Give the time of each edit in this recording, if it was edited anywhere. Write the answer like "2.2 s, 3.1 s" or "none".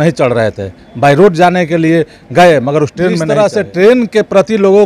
3.3 s